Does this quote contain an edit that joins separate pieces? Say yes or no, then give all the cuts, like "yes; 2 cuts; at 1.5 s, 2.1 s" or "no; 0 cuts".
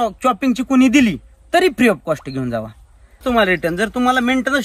yes; 1 cut; at 3.2 s